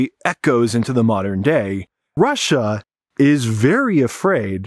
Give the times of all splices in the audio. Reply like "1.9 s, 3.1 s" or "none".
2.1 s